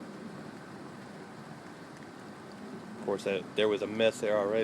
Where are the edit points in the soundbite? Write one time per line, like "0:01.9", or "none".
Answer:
0:03.1